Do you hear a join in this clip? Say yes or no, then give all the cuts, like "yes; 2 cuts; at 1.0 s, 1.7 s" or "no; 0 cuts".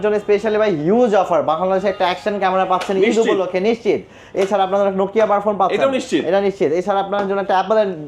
no; 0 cuts